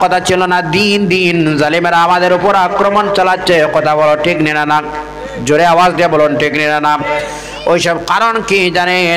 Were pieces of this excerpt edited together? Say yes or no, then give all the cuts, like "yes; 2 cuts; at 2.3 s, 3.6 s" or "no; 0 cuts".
no; 0 cuts